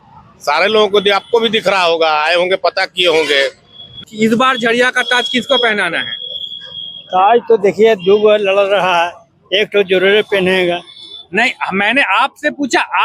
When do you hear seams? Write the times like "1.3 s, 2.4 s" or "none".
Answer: 4.0 s